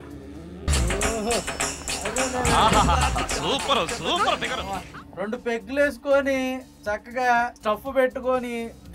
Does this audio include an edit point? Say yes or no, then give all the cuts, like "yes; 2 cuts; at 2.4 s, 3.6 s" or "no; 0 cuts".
no; 0 cuts